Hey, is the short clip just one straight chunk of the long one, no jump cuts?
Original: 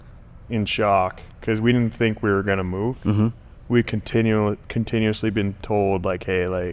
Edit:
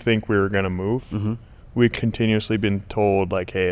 no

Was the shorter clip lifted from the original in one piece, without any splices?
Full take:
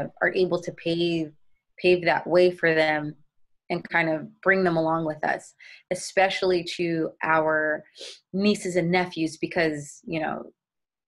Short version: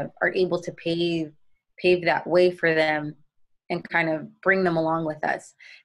yes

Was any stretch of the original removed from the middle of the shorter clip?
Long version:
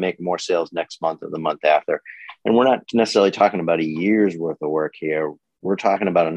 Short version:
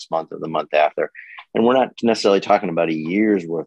no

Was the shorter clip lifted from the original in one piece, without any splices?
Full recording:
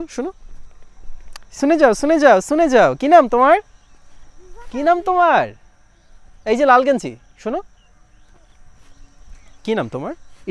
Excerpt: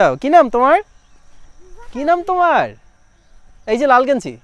yes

